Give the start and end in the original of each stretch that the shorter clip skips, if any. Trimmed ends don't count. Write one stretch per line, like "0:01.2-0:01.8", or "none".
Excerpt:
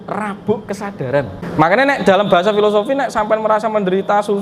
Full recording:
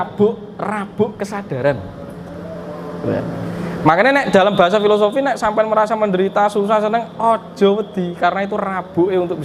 0:01.9-0:03.7